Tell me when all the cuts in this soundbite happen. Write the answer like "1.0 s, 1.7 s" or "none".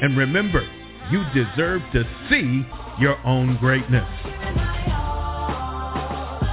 4.4 s